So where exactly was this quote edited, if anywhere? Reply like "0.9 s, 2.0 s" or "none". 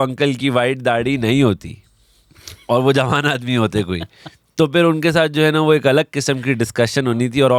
none